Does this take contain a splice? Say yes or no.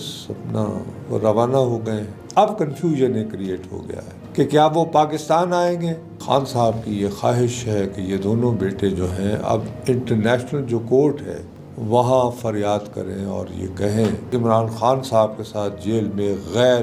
yes